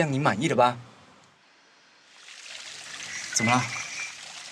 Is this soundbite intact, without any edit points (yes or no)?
no